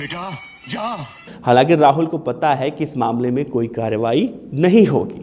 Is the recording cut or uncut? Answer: cut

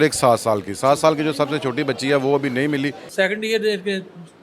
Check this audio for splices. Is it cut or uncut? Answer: cut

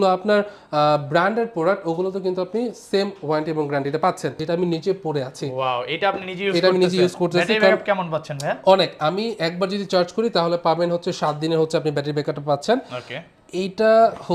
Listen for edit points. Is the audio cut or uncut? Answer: cut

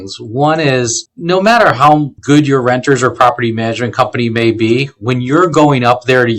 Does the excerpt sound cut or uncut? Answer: cut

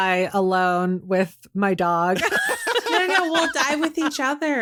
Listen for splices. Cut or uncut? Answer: uncut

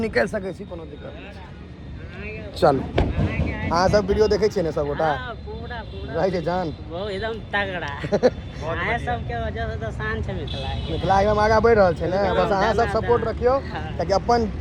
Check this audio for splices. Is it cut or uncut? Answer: uncut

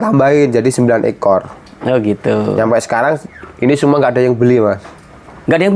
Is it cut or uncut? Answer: uncut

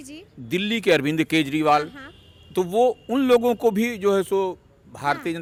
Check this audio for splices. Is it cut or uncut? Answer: uncut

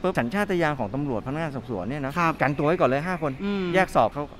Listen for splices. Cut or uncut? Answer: uncut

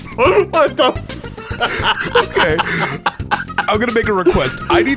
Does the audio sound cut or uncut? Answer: uncut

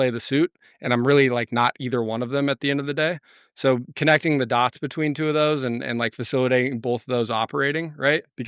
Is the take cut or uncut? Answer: uncut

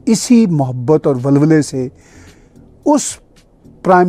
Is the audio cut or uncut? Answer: uncut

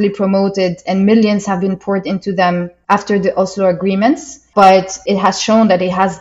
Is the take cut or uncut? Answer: cut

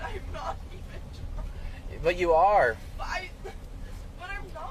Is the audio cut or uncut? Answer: uncut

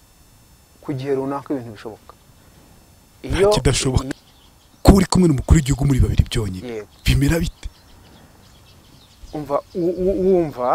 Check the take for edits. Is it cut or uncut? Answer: cut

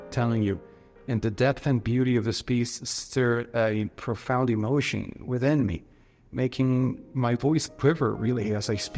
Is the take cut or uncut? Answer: uncut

